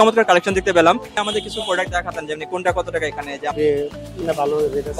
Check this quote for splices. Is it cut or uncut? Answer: cut